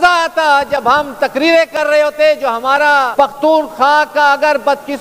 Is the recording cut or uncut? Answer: cut